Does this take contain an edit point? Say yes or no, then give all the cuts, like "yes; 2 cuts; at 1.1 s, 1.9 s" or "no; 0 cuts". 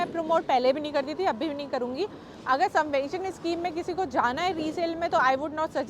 no; 0 cuts